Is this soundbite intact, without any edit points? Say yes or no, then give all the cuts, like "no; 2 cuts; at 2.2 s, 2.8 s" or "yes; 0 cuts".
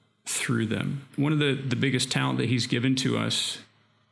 no; 1 cut; at 1.1 s